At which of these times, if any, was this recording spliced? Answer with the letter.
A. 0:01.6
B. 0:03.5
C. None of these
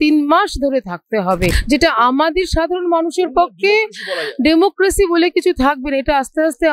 A